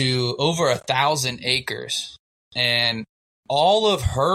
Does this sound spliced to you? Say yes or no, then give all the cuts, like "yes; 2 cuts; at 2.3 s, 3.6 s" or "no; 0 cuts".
yes; 1 cut; at 3.3 s